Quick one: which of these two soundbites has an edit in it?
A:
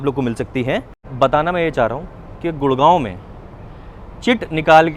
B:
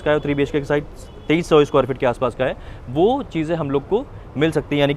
A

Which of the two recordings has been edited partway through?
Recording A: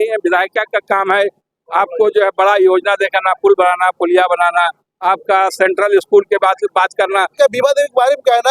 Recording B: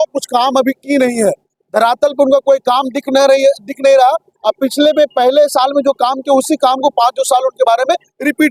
A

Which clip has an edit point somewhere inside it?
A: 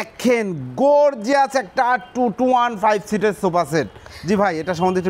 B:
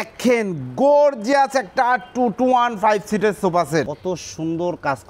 B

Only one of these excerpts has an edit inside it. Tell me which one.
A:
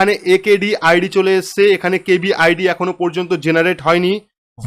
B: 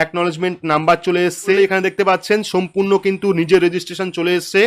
B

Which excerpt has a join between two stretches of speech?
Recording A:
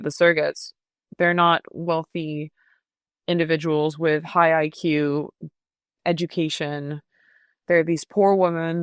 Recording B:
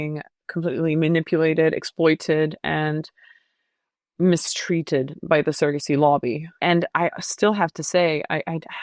B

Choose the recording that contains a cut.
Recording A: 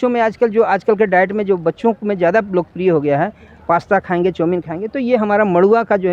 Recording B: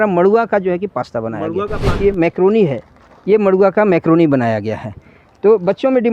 B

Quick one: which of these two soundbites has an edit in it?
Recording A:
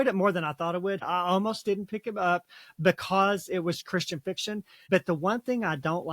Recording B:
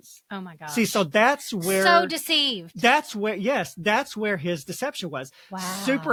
A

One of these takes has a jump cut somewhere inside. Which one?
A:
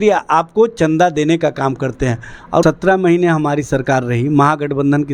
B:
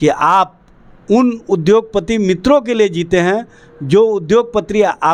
A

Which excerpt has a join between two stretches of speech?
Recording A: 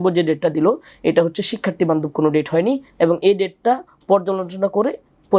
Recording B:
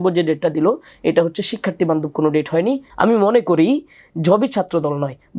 B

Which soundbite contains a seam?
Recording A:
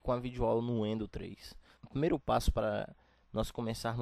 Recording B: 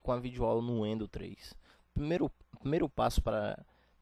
A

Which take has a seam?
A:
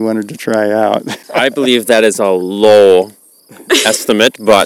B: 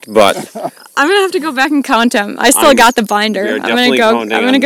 A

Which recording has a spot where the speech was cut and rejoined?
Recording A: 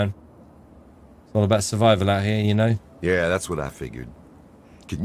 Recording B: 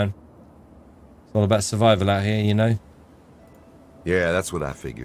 A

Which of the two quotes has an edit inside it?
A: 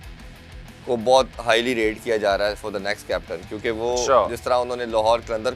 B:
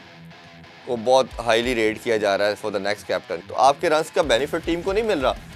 B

